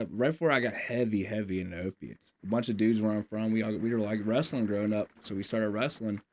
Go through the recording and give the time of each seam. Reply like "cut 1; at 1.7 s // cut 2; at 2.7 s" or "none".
cut 1; at 2.4 s